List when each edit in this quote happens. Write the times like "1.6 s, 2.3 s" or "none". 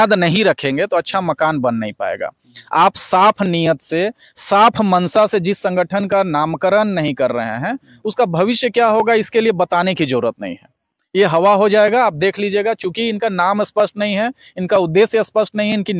none

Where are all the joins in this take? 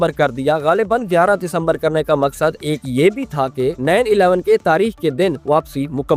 none

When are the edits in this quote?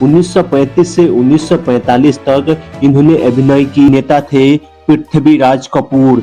3.9 s

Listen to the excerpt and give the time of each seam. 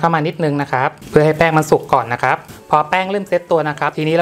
1.0 s, 2.5 s

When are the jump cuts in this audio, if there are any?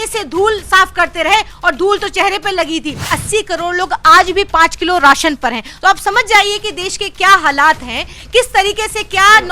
3.1 s

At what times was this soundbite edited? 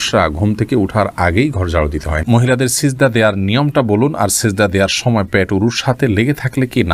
2.2 s

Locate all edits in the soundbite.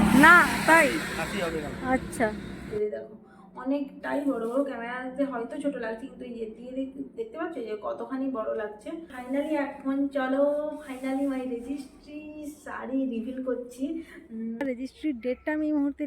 2.7 s, 9.1 s, 14.6 s

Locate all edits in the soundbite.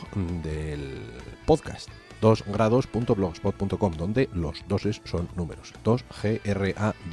none

